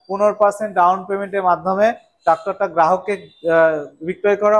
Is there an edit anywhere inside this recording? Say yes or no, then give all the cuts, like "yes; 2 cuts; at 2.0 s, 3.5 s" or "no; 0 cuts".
no; 0 cuts